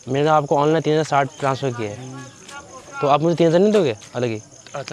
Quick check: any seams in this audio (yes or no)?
no